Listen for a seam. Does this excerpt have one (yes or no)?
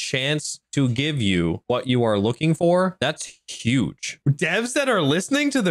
yes